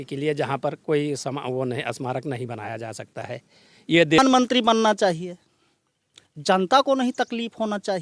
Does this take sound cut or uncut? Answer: cut